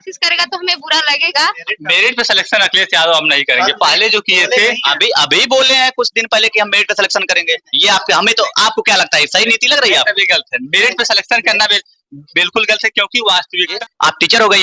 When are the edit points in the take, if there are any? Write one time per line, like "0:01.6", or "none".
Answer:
0:01.6
0:13.7